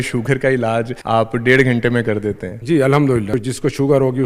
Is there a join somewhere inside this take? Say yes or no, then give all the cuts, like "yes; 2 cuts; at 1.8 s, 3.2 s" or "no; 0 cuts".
yes; 3 cuts; at 1.0 s, 2.5 s, 3.3 s